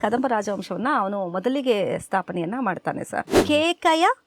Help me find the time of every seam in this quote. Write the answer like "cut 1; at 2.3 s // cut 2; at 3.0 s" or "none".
cut 1; at 3.4 s